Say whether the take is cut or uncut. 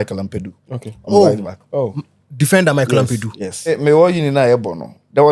cut